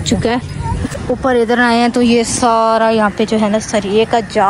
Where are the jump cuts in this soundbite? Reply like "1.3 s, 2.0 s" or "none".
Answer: 0.9 s